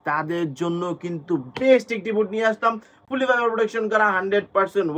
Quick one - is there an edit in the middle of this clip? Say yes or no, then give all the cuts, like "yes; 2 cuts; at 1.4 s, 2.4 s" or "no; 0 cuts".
no; 0 cuts